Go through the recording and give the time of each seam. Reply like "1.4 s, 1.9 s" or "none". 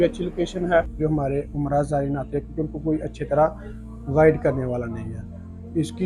1.0 s